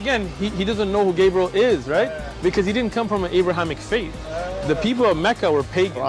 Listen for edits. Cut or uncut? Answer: uncut